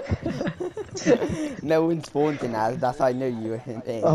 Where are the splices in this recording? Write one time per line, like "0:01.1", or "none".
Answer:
none

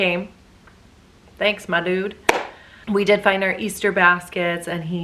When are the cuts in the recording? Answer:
none

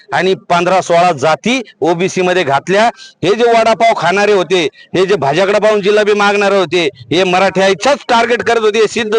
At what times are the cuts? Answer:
none

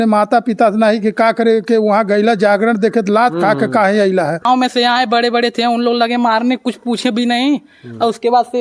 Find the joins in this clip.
0:04.4

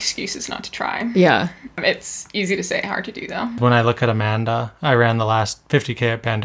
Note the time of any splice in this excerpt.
0:01.8
0:03.6

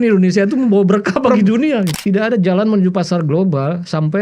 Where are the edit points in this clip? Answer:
0:01.9

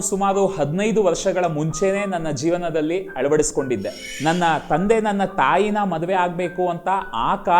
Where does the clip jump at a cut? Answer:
0:03.5

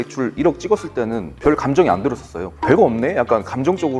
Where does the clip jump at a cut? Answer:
0:01.3
0:02.5

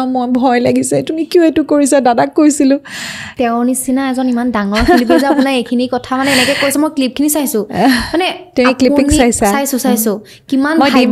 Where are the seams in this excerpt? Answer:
0:02.9

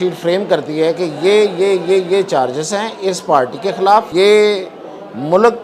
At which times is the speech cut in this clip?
0:04.1

